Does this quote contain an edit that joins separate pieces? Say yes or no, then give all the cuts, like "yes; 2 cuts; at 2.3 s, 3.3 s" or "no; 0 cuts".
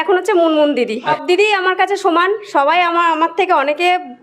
yes; 1 cut; at 1.2 s